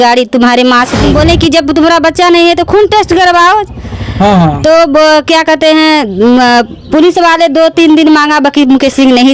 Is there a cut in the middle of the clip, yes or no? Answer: yes